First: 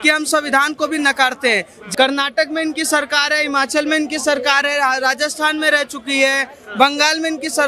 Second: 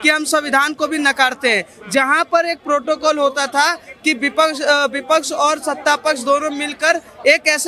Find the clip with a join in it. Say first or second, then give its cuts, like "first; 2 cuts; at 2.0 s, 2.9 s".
first; 1 cut; at 1.8 s